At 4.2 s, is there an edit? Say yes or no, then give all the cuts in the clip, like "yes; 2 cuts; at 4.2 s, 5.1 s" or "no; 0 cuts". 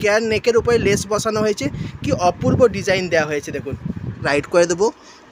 yes; 1 cut; at 4.2 s